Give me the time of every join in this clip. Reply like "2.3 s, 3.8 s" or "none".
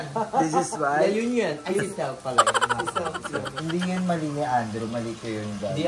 3.5 s